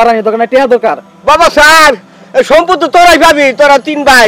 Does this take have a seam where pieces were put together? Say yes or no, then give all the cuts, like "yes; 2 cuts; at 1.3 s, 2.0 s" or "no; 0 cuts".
yes; 1 cut; at 1.1 s